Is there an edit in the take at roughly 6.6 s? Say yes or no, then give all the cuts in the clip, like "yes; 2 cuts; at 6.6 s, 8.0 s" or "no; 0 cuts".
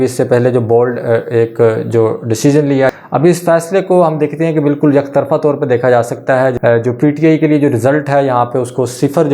yes; 2 cuts; at 3.0 s, 6.6 s